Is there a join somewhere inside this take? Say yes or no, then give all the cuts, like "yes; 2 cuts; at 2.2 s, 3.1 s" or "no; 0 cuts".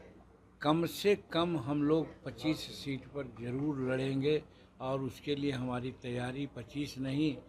no; 0 cuts